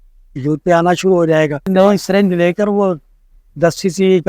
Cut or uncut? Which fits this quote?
cut